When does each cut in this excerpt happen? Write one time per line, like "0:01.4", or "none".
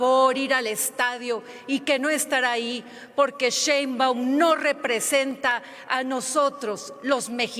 none